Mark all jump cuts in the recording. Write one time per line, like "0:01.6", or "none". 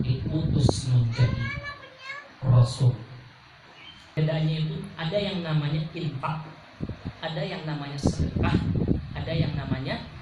0:04.2